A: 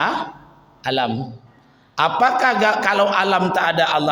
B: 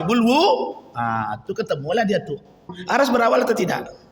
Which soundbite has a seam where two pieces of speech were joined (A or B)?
B